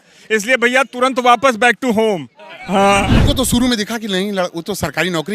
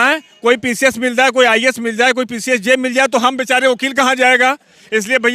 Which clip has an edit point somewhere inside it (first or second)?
first